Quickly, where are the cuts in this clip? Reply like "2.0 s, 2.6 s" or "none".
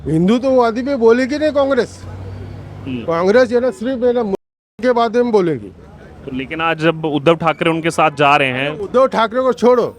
none